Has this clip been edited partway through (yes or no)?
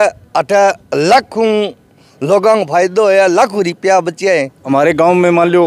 yes